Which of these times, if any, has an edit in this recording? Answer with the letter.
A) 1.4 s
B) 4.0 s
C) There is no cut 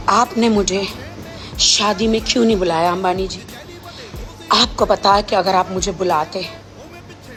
C